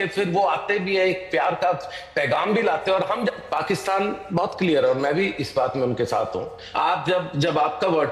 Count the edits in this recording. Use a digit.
2